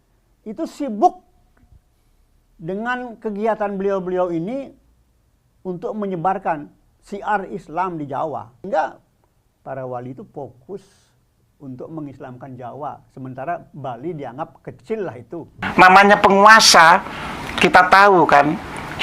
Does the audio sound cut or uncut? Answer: cut